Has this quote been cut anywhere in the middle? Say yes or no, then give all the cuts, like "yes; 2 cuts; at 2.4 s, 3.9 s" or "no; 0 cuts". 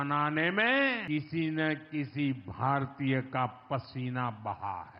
yes; 1 cut; at 1.0 s